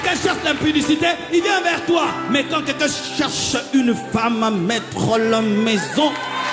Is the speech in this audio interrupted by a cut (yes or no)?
no